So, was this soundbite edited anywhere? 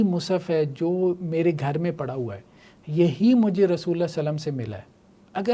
no; 0 cuts

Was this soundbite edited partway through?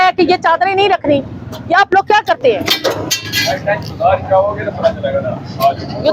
no; 0 cuts

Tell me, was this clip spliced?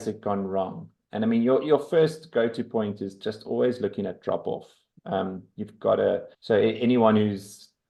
no; 0 cuts

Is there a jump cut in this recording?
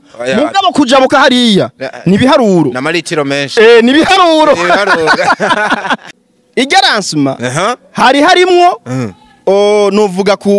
yes; 1 cut; at 6.1 s

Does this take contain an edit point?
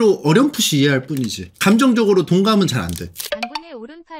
yes; 1 cut; at 3.1 s

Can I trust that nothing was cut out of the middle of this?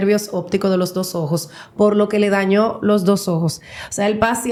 yes; 0 cuts

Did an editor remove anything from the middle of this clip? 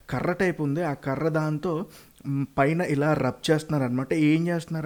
no; 0 cuts

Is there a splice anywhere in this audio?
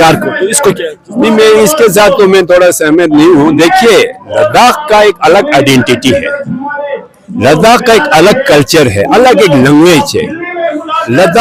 no; 0 cuts

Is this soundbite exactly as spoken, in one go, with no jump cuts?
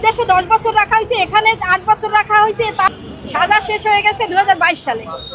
no; 1 cut; at 2.9 s

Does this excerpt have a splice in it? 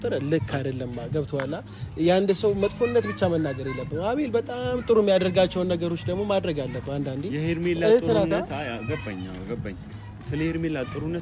no; 0 cuts

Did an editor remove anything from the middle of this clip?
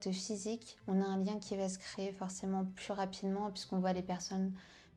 no; 0 cuts

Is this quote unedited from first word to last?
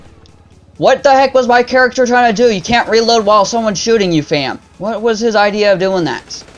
yes; 0 cuts

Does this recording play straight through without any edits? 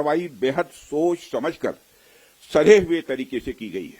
yes; 0 cuts

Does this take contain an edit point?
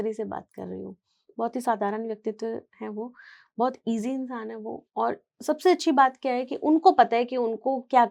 no; 0 cuts

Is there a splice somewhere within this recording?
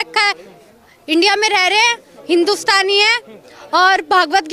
no; 0 cuts

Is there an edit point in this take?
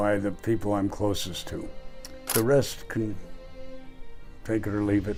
no; 0 cuts

